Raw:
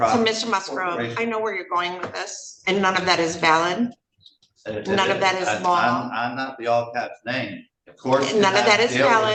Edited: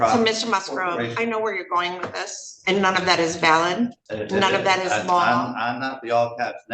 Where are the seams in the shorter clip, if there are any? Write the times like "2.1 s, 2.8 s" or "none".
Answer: 4.1 s